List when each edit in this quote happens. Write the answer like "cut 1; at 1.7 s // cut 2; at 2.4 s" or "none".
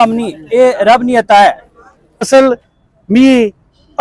cut 1; at 2.3 s